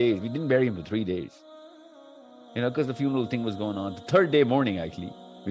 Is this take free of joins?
yes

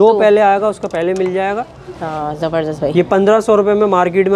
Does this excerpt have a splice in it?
no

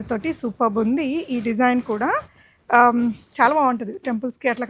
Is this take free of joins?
yes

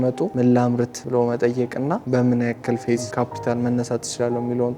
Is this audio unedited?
no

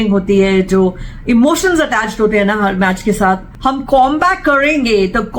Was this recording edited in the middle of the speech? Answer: yes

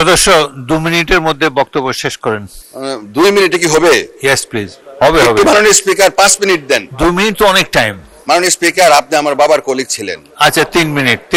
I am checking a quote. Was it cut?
no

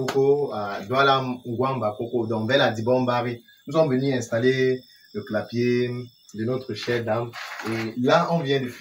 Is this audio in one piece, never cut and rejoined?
yes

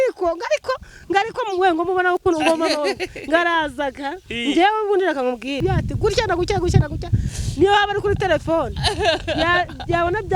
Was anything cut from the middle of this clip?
yes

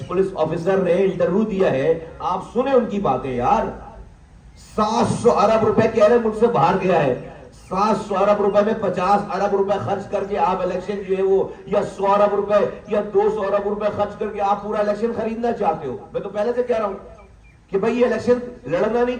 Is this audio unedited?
yes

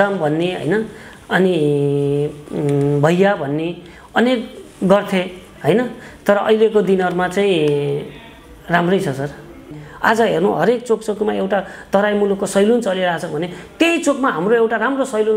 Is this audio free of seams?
no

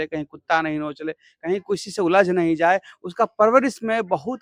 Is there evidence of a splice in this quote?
no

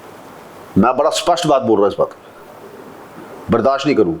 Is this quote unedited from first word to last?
yes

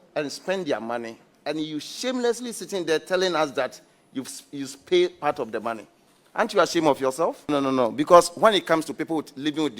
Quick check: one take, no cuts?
no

